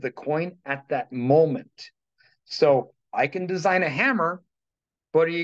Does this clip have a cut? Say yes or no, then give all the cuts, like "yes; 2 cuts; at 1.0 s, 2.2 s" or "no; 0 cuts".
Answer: no; 0 cuts